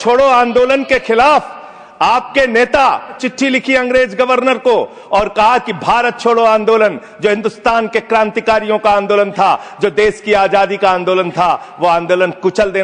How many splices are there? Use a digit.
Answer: 1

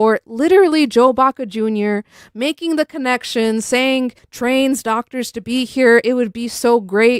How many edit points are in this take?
1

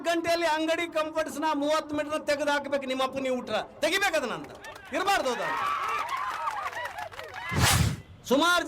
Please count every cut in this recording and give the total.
1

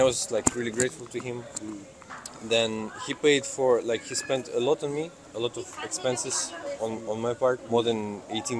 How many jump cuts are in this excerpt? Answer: 2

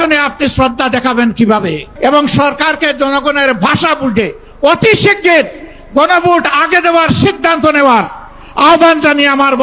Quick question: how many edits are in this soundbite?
1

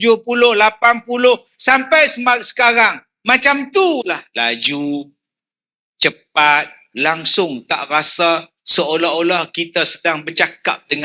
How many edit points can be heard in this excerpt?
2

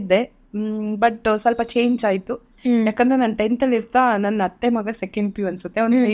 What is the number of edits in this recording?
1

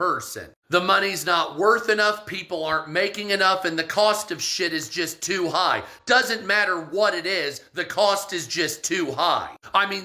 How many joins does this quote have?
0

